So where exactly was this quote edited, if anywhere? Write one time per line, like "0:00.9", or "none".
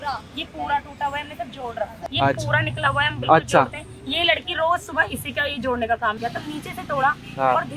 0:02.0
0:06.2

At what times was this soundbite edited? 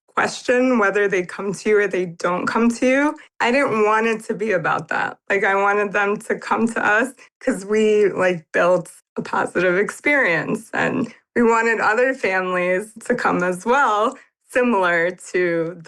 none

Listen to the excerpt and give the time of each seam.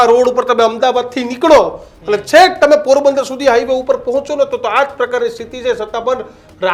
none

